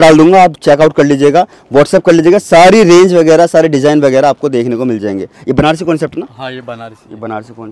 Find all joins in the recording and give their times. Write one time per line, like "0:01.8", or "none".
none